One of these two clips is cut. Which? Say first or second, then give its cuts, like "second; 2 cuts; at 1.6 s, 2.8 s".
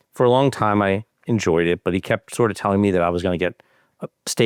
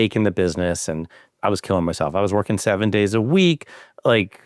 second; 1 cut; at 1.3 s